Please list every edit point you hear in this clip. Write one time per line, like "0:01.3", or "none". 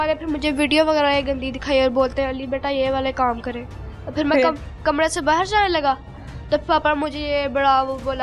none